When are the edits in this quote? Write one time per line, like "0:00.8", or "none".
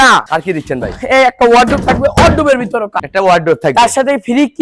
0:03.0